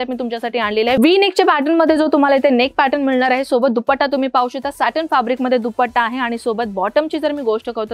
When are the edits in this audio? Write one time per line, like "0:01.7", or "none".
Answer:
none

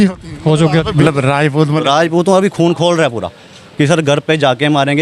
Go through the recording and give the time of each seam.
0:01.0

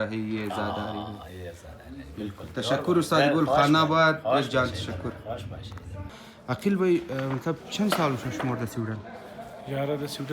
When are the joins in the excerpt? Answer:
0:06.1

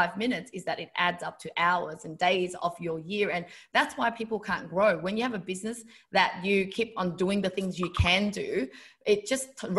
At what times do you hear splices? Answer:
none

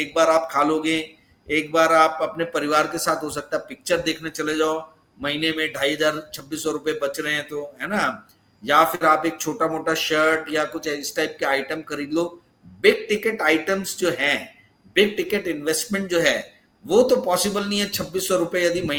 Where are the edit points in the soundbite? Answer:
none

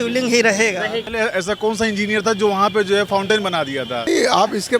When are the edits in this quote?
0:01.0
0:04.1

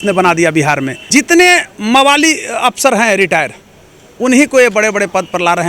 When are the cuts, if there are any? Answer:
0:01.0

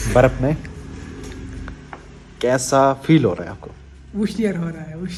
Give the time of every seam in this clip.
none

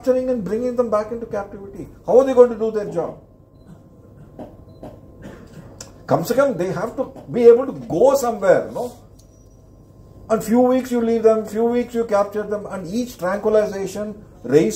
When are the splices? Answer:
none

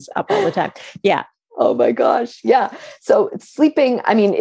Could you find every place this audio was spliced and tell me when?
none

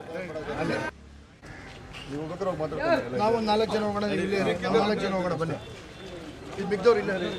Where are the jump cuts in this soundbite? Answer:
0:00.9

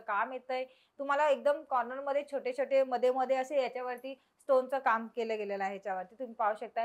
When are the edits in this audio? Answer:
none

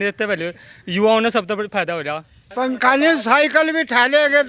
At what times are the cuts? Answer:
0:02.4

